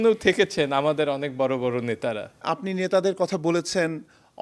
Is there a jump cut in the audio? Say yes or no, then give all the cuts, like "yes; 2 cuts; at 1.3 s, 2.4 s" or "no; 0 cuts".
yes; 1 cut; at 2.4 s